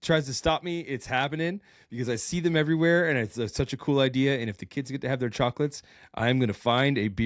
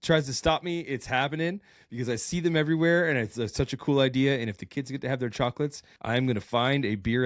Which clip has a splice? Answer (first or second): second